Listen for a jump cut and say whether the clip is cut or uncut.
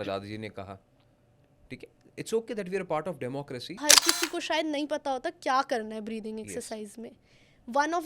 cut